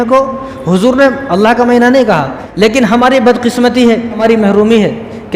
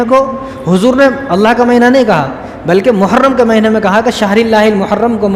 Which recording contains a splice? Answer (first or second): first